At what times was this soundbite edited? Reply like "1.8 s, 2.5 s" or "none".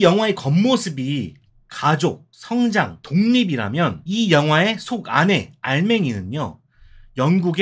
2.3 s, 3.0 s, 4.0 s